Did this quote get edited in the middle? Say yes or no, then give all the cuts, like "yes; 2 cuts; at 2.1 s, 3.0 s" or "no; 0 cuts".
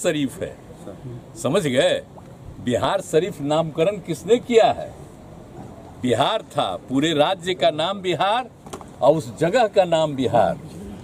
no; 0 cuts